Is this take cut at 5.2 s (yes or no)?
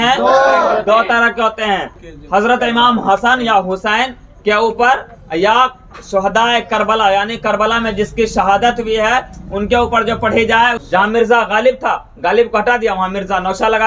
no